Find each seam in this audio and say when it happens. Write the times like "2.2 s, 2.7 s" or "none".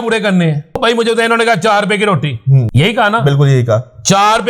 0.8 s, 2.7 s